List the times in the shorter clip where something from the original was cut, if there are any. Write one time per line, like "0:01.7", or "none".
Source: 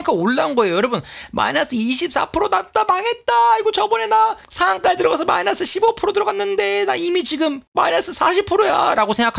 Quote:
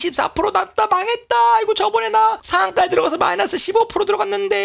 0:02.4